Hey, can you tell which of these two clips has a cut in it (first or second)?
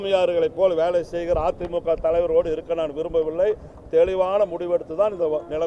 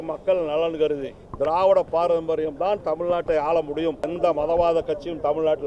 second